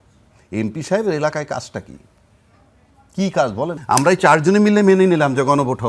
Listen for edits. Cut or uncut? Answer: cut